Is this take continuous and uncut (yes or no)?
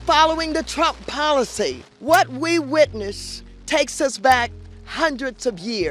no